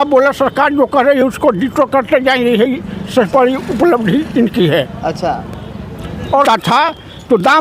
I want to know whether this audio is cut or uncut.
cut